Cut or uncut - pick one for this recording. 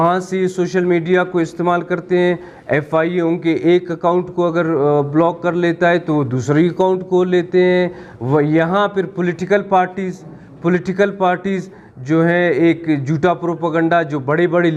uncut